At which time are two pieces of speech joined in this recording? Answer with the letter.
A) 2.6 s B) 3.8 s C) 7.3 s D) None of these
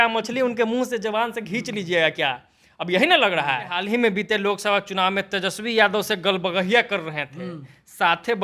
B